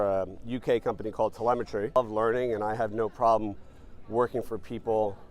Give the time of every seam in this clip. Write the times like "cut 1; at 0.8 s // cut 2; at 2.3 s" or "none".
cut 1; at 2.0 s